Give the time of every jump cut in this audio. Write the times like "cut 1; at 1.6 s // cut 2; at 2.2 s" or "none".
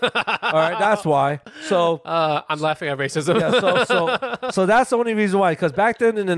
none